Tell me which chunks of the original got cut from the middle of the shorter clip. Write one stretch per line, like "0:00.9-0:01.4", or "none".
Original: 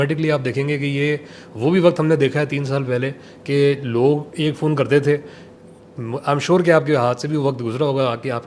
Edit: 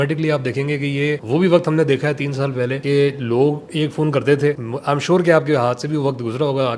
0:01.2-0:01.5
0:03.1-0:03.4
0:05.3-0:06.1